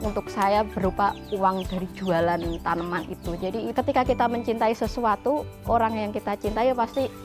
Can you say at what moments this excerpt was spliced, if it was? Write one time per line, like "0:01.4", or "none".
0:03.7